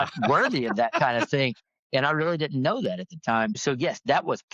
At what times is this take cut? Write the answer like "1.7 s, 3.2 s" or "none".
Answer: 3.6 s